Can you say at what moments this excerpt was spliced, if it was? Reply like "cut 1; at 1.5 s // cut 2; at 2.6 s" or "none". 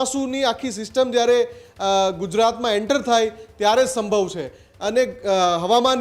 cut 1; at 4.6 s